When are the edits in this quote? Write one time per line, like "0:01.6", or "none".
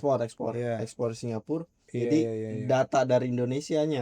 0:01.8